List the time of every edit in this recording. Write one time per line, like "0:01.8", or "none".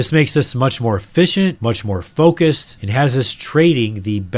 none